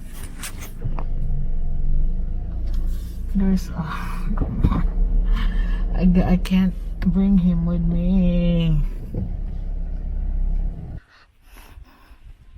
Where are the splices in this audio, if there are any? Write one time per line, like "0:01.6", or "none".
0:11.0